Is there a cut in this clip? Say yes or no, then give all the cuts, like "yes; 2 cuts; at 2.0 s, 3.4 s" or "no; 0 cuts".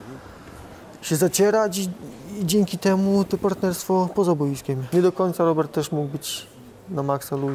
yes; 1 cut; at 4.7 s